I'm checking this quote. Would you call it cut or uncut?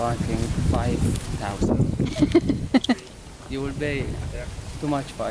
uncut